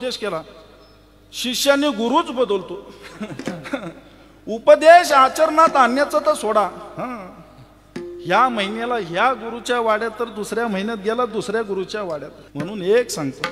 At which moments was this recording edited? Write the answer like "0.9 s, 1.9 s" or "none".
12.4 s